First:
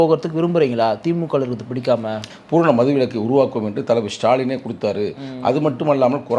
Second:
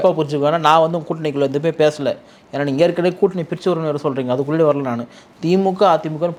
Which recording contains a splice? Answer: first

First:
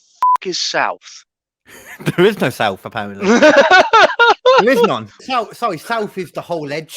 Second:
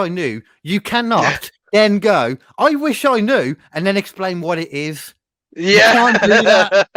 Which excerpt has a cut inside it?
first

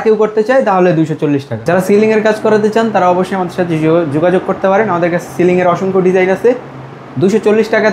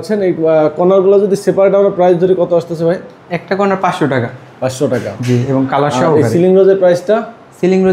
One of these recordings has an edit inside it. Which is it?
first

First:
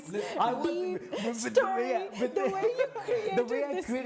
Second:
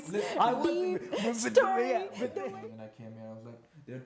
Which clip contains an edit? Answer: second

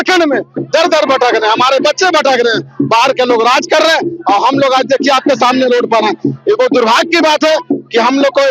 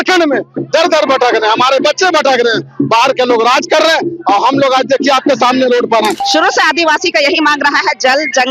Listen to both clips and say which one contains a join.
second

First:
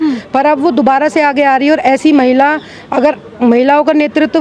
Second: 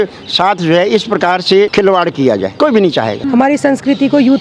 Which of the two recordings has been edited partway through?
second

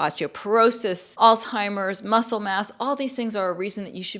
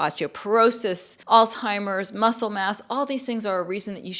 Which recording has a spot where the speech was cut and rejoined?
first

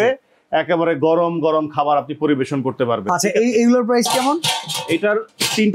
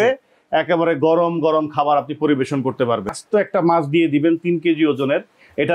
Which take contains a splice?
second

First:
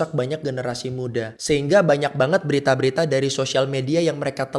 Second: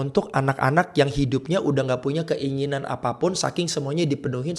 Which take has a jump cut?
first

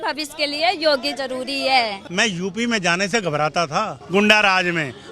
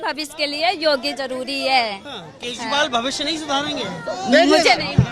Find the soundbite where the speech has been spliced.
first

